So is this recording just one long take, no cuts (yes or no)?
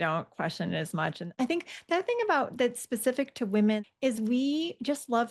no